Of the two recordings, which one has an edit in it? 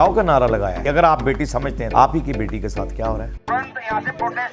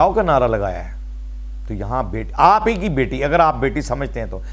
first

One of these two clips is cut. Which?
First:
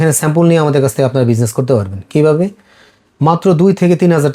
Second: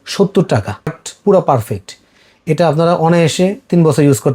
second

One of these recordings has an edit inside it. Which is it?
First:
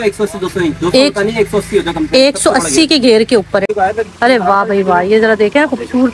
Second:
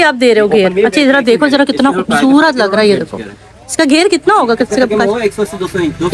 first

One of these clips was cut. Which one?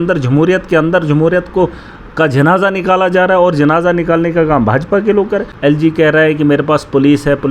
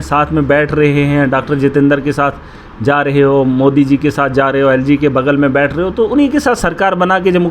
first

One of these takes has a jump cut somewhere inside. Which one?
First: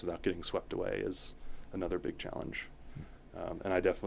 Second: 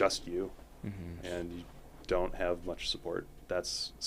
second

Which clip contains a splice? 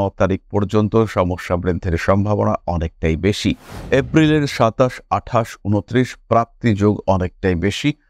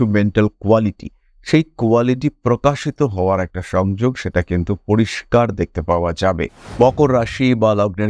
second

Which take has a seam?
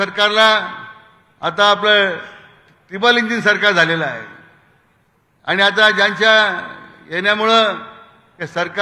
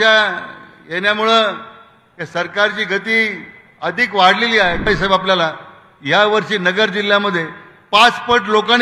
second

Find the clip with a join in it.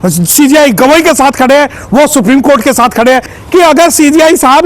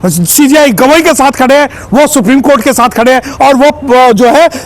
first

